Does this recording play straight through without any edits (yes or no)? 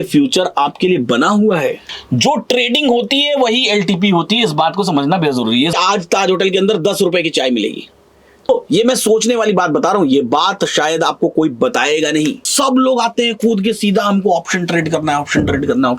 no